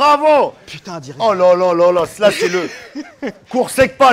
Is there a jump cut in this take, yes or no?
no